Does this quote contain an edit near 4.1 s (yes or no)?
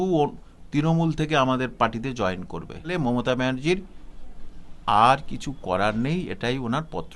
no